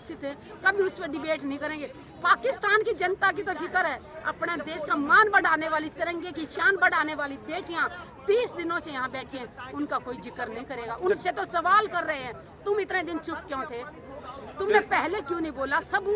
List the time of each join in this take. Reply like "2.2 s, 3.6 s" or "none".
none